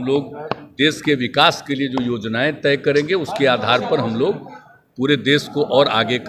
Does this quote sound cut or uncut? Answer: uncut